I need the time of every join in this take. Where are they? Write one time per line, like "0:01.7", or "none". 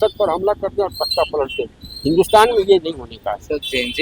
none